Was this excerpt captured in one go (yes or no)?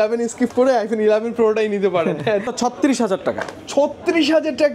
no